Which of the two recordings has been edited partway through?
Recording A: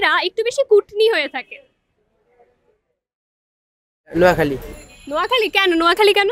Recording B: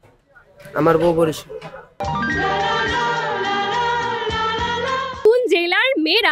B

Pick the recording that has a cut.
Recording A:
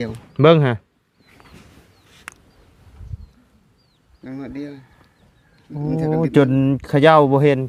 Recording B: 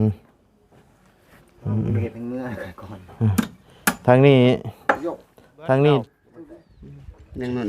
B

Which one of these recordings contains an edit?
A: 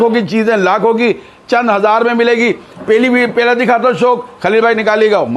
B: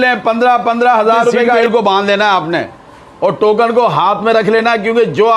B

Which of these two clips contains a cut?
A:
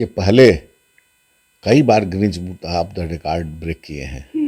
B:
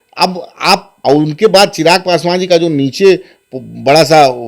B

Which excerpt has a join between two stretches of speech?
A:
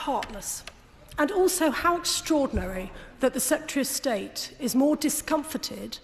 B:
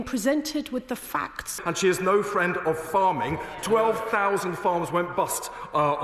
B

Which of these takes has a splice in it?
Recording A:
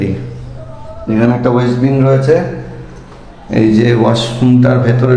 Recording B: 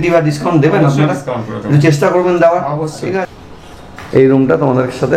B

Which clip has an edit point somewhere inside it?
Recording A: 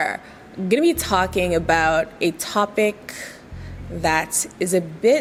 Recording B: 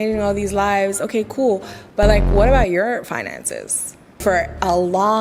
B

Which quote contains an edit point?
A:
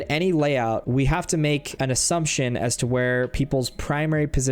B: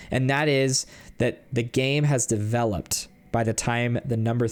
A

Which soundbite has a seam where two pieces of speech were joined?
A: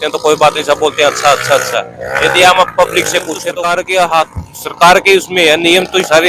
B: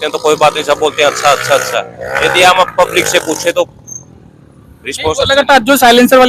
A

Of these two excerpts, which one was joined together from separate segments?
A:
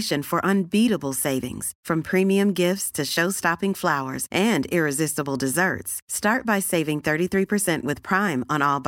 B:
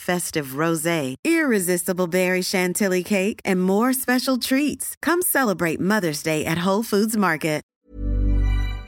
B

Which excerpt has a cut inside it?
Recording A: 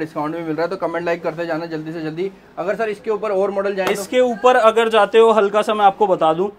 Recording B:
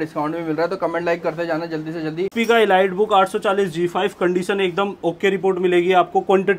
B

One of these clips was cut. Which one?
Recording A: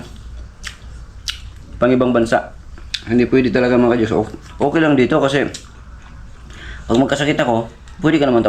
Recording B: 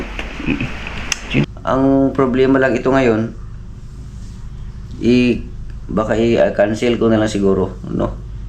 B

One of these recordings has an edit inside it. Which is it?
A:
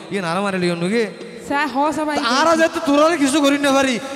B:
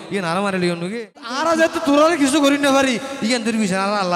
B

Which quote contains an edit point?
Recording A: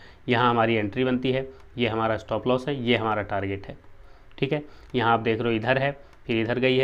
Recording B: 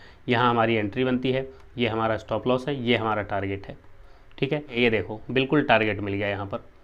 B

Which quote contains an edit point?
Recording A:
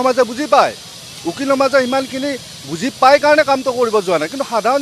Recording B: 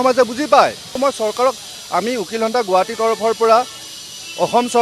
B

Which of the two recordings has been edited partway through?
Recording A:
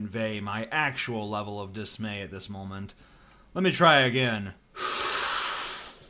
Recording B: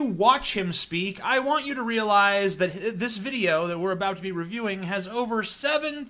B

